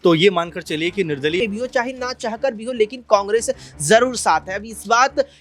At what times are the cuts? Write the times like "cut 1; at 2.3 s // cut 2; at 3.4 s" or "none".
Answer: cut 1; at 1.4 s